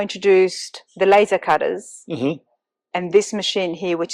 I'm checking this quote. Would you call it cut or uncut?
uncut